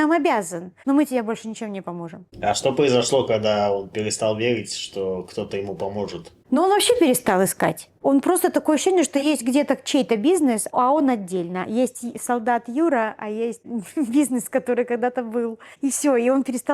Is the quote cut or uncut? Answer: uncut